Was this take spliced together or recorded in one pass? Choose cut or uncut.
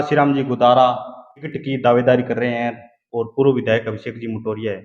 cut